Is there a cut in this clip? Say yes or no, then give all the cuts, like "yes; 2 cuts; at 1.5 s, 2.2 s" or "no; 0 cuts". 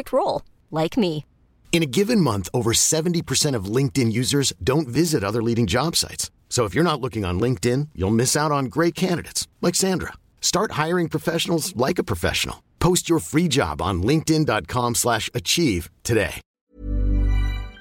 yes; 1 cut; at 16.6 s